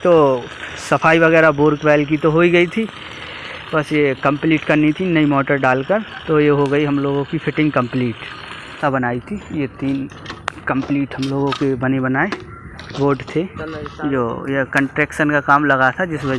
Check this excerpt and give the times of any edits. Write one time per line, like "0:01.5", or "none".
0:08.8